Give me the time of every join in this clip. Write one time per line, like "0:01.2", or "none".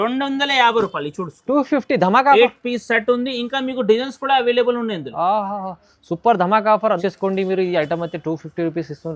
0:07.0

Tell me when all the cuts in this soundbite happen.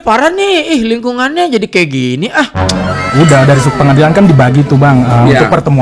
0:03.0

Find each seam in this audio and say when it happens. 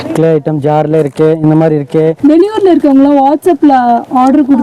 0:02.2

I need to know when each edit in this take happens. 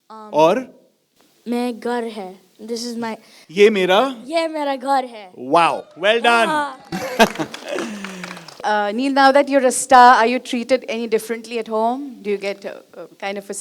0:08.6

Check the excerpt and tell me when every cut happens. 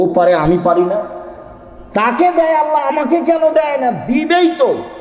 none

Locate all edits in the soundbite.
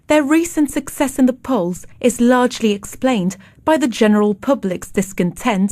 0:02.4

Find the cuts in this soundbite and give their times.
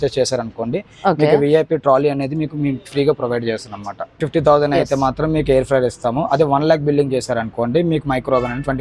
0:04.2

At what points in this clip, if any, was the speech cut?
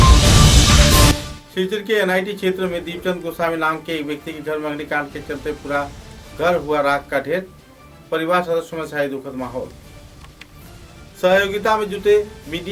0:01.3

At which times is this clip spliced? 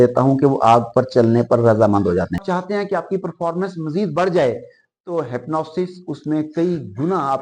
0:02.4

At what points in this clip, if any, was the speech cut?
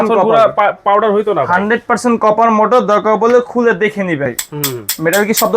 0:04.3

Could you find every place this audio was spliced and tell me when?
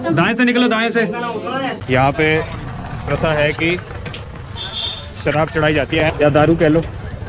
0:01.8
0:06.0

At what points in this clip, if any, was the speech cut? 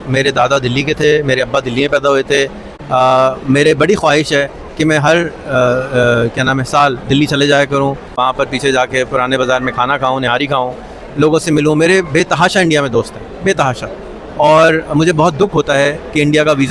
none

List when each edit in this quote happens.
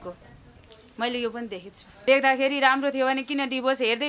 0:01.9

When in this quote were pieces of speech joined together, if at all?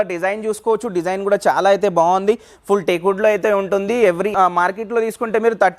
0:04.3

